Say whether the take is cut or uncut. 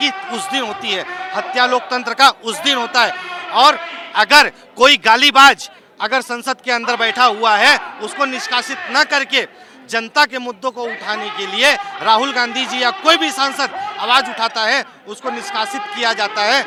uncut